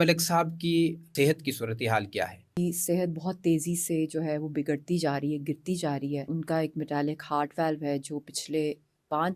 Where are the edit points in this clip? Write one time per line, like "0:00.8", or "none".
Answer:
0:01.0
0:02.6
0:06.3